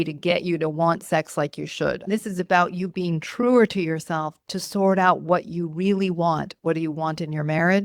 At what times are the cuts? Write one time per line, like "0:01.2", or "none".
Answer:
0:02.0